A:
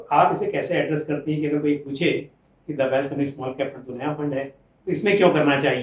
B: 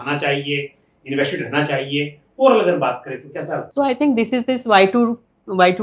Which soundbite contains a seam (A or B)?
B